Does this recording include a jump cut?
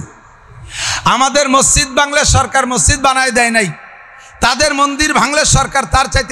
no; 0 cuts

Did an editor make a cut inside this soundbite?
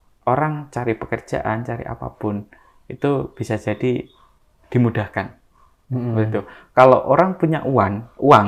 no; 0 cuts

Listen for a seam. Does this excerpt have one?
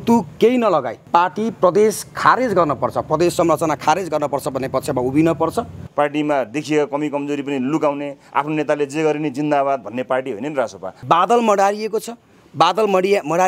yes; 2 cuts; at 5.8 s, 10.9 s

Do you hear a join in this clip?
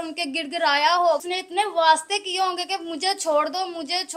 yes; 1 cut; at 1.2 s

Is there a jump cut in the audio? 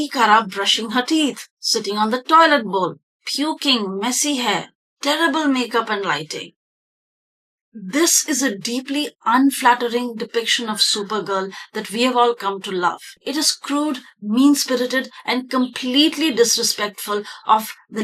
no; 0 cuts

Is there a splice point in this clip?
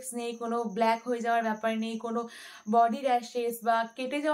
no; 0 cuts

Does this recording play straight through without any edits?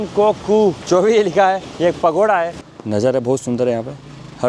no; 3 cuts; at 0.8 s, 1.7 s, 2.6 s

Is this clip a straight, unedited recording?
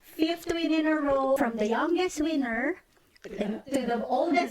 no; 1 cut; at 1.4 s

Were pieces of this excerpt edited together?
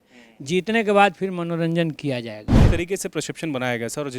yes; 1 cut; at 2.6 s

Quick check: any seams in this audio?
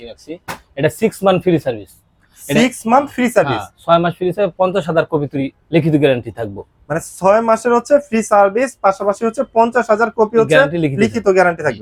no; 0 cuts

